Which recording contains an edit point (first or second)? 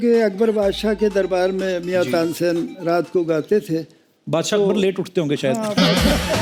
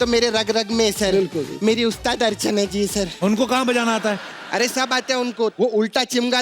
second